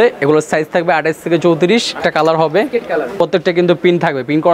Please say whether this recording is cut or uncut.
cut